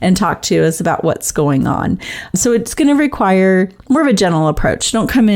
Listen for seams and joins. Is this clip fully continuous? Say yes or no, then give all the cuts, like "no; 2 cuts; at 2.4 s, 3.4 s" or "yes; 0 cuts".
no; 1 cut; at 2.3 s